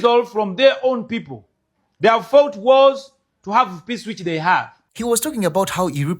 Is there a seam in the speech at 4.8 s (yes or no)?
yes